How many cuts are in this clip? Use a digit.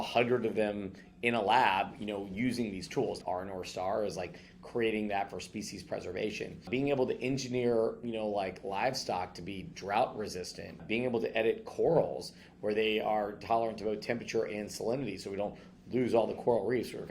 3